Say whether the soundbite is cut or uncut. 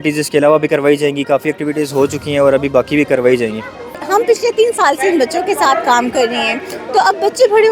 cut